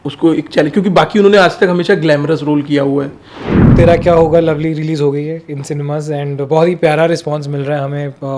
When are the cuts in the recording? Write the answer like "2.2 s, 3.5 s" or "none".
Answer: 3.6 s